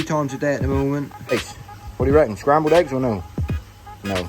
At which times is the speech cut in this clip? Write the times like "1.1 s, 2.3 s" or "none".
1.3 s